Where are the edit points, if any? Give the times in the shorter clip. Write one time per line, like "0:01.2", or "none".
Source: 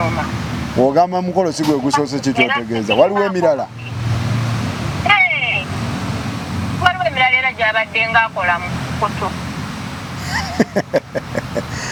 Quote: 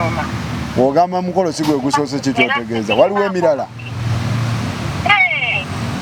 none